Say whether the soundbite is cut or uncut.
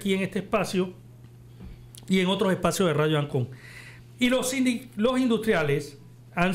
uncut